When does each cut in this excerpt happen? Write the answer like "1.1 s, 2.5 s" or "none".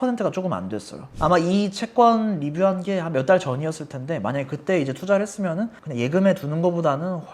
5.8 s